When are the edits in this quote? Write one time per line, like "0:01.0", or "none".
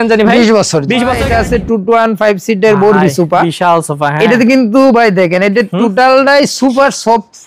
0:01.2